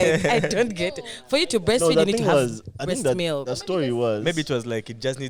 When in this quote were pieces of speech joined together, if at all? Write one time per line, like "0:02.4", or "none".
none

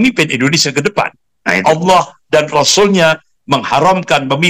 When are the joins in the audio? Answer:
0:01.6

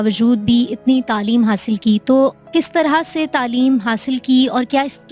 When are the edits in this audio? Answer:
none

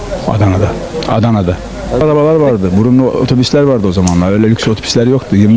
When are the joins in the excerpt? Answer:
0:02.0

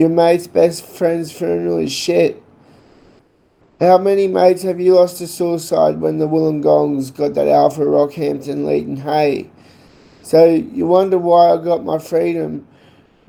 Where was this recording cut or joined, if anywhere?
none

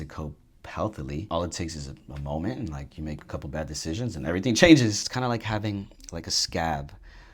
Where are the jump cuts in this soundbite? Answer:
0:01.3
0:05.1

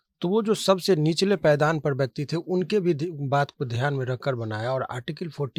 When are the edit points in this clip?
none

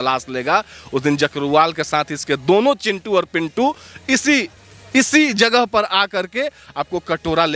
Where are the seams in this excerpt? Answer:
none

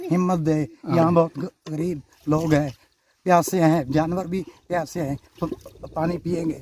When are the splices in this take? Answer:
none

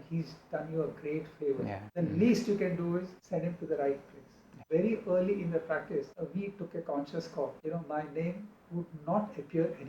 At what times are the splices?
0:01.8
0:03.2
0:04.6
0:06.1
0:07.6

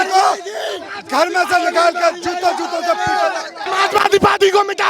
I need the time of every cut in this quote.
0:03.6

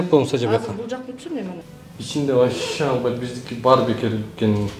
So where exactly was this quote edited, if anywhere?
0:01.7

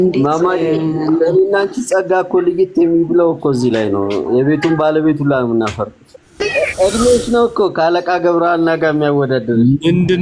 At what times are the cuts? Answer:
0:06.4

